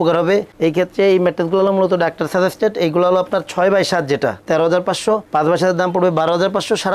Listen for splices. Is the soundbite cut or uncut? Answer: uncut